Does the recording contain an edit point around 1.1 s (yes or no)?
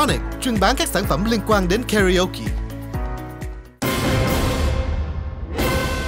no